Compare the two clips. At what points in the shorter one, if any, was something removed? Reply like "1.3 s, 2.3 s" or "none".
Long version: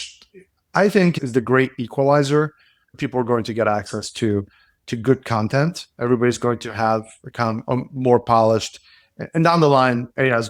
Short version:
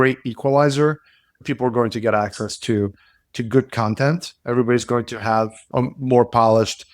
5.7 s

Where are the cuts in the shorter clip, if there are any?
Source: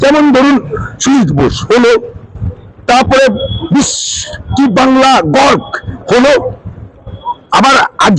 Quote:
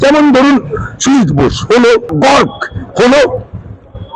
2.1 s

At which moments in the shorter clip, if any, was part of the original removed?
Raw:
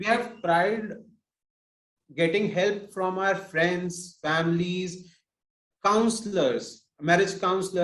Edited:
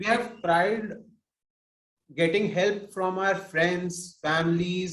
none

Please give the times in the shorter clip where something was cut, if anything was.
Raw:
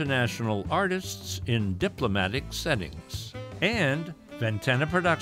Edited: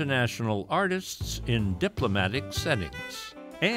none

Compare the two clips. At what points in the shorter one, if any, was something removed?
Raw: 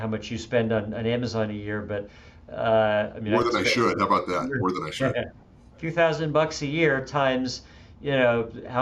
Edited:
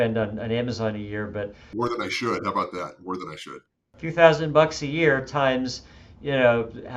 1.6 s, 3.5 s

